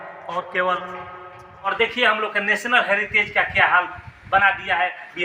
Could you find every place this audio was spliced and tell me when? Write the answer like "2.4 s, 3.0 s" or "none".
1.7 s